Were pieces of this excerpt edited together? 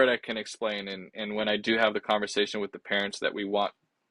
no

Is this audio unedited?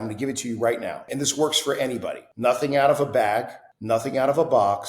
no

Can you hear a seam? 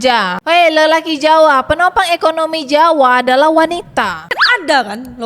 yes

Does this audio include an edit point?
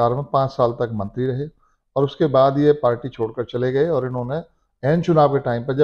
no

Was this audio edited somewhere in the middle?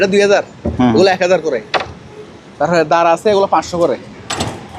no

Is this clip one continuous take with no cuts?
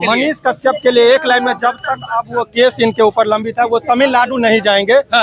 yes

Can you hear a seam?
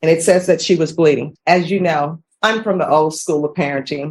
yes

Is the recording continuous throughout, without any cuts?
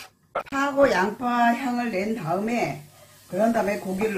yes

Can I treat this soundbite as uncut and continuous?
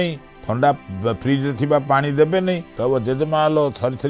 no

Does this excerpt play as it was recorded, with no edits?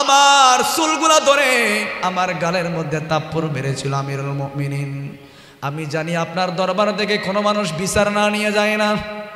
yes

